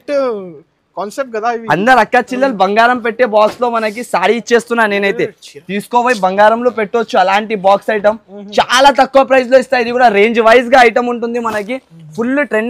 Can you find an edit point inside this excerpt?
no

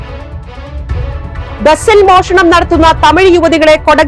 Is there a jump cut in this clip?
yes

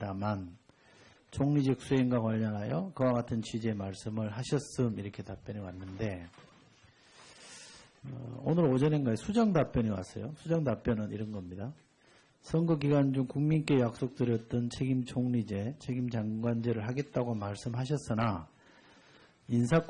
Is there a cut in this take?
yes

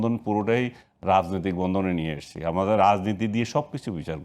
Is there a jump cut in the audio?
no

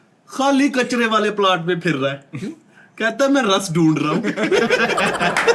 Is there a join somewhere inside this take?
no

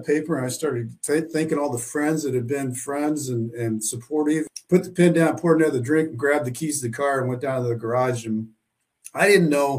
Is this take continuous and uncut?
no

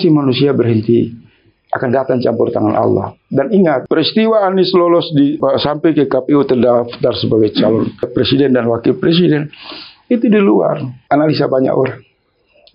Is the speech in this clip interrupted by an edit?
yes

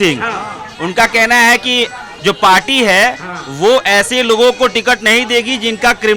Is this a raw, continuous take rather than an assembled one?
yes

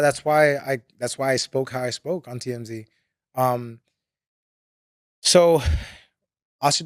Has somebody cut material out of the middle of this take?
no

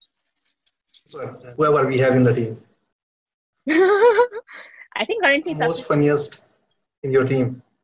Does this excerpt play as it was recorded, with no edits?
no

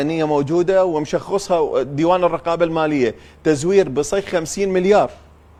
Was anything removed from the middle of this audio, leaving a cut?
no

